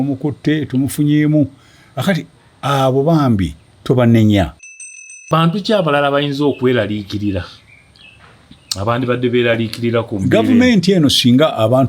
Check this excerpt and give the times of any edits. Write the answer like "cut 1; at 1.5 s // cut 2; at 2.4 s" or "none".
cut 1; at 5.2 s